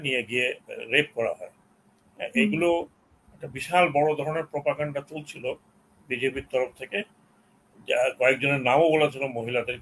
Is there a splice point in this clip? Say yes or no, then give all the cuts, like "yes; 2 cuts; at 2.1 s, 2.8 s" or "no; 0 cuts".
no; 0 cuts